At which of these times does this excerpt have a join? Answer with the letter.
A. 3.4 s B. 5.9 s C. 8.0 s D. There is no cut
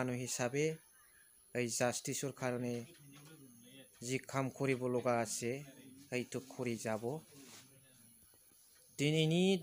C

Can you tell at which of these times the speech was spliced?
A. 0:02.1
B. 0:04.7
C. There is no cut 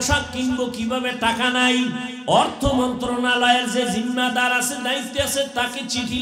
A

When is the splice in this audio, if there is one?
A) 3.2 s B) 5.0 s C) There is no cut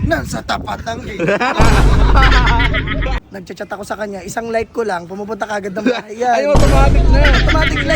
A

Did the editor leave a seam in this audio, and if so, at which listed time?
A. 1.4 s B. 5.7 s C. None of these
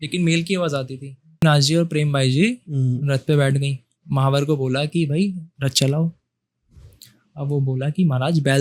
A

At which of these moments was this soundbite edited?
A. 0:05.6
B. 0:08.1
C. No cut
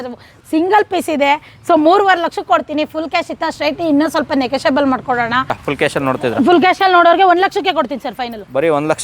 A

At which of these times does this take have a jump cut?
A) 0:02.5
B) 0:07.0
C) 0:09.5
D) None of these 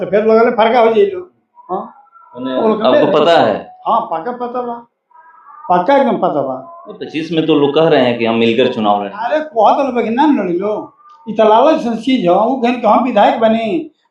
D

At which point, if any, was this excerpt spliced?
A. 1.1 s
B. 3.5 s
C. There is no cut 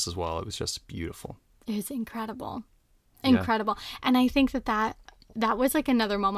C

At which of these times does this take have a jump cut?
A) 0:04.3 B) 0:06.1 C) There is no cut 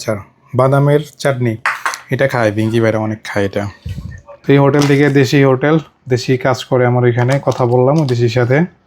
A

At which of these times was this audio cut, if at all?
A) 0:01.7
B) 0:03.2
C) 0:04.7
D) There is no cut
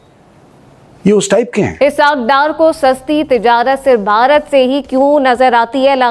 A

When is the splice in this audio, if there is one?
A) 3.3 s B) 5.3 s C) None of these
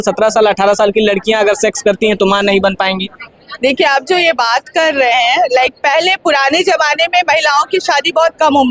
C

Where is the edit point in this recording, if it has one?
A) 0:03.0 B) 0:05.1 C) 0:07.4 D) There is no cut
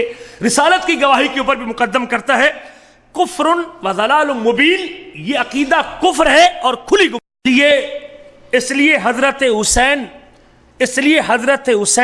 C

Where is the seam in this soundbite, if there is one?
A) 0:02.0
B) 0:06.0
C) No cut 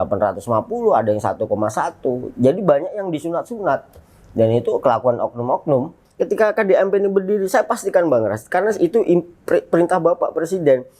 B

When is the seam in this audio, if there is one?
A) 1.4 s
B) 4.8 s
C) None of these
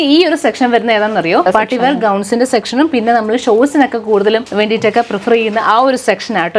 A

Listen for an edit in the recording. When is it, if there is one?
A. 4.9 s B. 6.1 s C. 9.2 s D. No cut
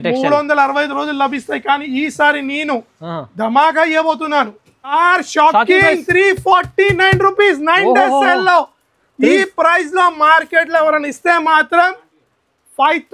A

